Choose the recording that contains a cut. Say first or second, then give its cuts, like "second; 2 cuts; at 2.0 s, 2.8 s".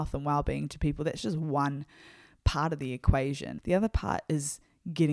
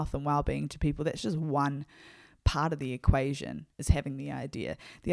first; 1 cut; at 3.5 s